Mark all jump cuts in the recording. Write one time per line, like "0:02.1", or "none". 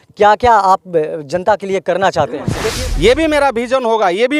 0:02.6